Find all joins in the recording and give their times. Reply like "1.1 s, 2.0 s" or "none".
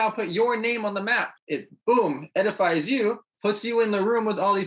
1.3 s, 3.3 s